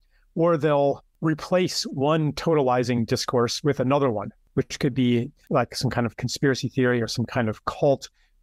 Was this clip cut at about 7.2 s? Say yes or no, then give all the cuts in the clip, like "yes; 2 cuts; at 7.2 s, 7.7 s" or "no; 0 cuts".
no; 3 cuts; at 1.1 s, 4.3 s, 5.4 s